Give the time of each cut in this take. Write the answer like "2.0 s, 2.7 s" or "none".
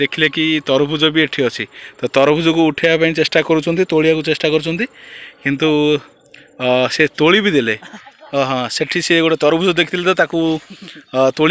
7.8 s

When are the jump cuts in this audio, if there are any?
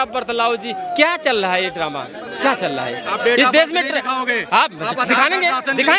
none

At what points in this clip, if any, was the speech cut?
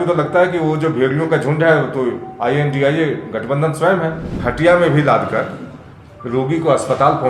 4.3 s

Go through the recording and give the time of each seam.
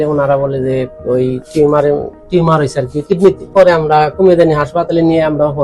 3.5 s

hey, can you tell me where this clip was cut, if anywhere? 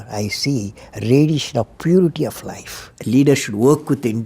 2.9 s

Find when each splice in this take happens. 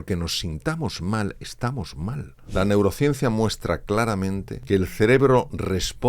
2.3 s, 4.5 s

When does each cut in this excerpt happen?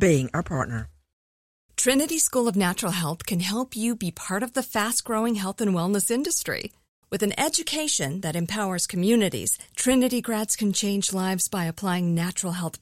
1.2 s

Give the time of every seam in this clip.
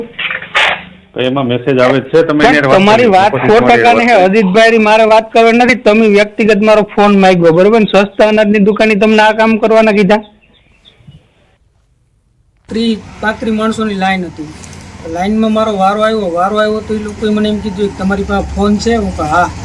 5.0 s

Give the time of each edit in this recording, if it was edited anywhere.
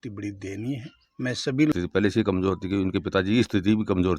1.7 s

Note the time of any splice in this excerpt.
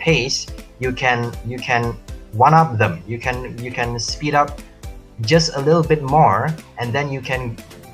none

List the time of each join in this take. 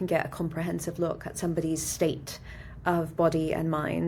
none

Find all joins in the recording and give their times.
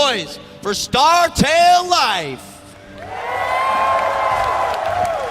4.0 s

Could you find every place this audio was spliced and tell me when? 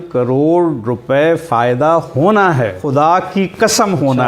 2.8 s

